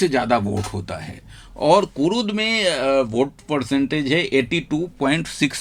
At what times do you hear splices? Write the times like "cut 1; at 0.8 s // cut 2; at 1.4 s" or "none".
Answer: none

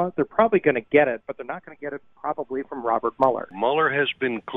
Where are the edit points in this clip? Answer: cut 1; at 3.5 s

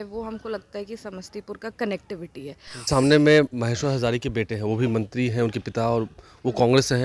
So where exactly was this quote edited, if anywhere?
cut 1; at 2.9 s

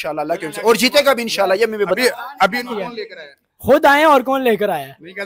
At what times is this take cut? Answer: cut 1; at 2.0 s

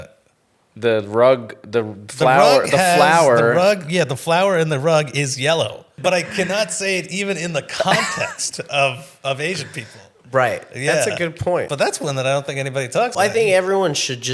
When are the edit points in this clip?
cut 1; at 5.9 s // cut 2; at 11.7 s // cut 3; at 13.1 s

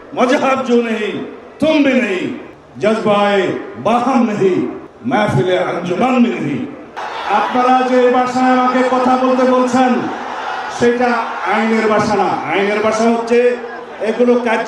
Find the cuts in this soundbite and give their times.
cut 1; at 4.9 s // cut 2; at 6.9 s

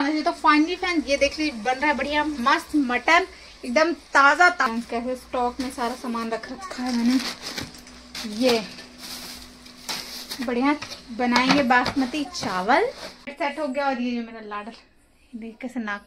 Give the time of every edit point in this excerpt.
cut 1; at 4.7 s // cut 2; at 13.3 s

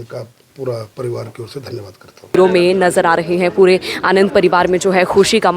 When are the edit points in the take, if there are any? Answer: cut 1; at 2.4 s

